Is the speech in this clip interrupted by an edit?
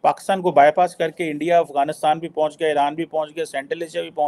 no; 0 cuts

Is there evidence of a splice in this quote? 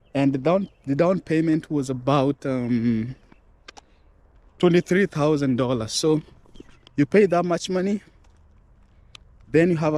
no; 0 cuts

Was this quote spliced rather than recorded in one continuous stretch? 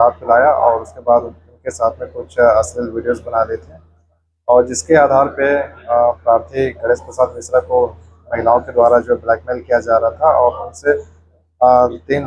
no; 0 cuts

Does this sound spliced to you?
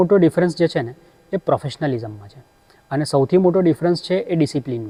no; 0 cuts

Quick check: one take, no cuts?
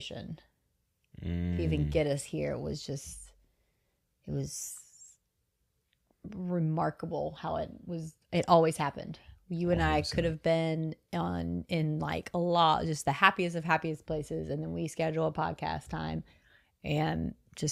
yes; 0 cuts

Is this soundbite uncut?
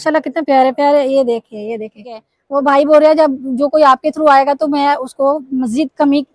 no; 1 cut; at 2.3 s

